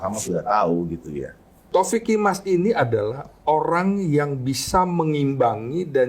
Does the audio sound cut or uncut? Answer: cut